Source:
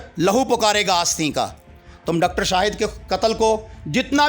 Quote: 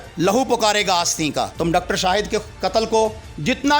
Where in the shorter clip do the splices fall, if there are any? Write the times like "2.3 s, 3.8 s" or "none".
1.5 s